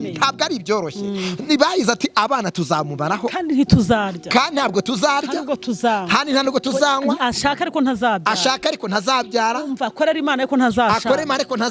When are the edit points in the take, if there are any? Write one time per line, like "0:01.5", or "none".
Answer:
none